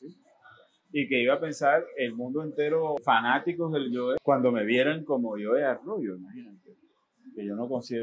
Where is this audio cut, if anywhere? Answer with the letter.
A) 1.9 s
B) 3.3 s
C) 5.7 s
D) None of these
D